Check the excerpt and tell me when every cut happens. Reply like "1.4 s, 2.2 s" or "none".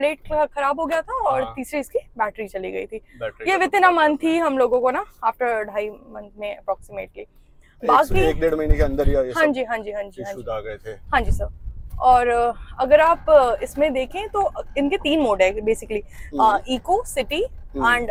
none